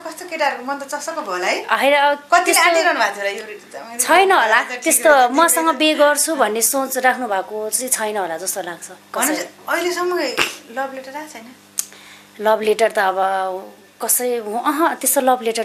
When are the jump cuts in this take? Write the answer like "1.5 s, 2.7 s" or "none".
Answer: none

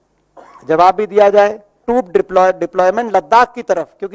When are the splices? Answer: 1.8 s

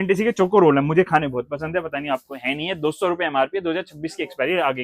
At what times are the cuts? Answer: none

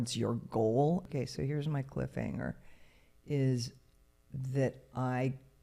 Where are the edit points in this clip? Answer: 1.1 s

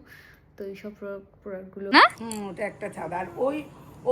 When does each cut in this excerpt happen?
1.8 s

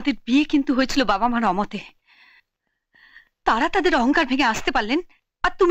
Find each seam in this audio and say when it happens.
none

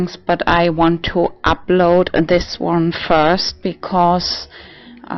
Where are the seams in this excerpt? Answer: none

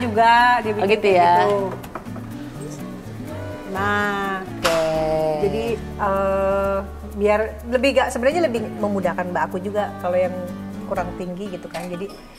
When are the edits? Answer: none

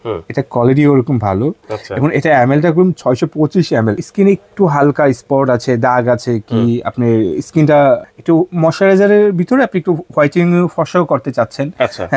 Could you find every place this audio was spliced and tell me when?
4.0 s, 8.1 s

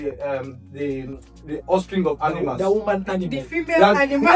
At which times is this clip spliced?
none

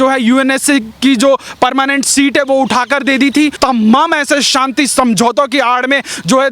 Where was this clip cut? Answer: 3.5 s

